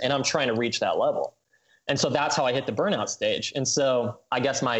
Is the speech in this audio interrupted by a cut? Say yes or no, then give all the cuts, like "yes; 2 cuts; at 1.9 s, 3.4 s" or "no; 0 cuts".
no; 0 cuts